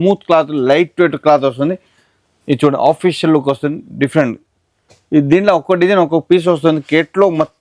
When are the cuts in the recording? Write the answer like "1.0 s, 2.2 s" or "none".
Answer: none